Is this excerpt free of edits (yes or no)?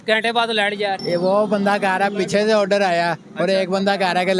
no